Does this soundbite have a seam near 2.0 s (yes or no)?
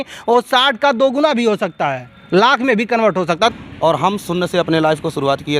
no